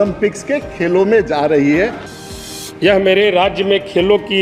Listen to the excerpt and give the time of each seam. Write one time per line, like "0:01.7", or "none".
0:02.1